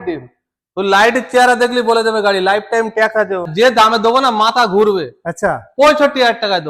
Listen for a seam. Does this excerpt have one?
yes; 1 cut; at 3.5 s

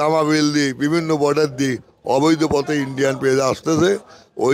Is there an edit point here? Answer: no; 0 cuts

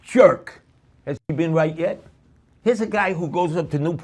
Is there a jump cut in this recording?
yes; 1 cut; at 1.2 s

